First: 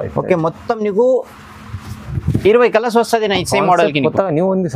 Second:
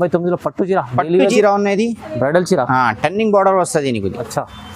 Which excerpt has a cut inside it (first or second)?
second